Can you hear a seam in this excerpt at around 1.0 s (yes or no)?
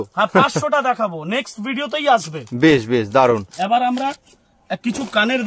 no